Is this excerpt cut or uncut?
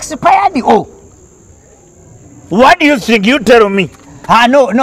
uncut